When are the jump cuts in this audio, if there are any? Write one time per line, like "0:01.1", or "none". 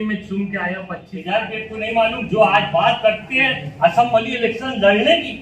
0:01.1